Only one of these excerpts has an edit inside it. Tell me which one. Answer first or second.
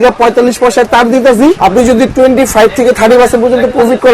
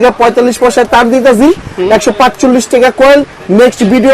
first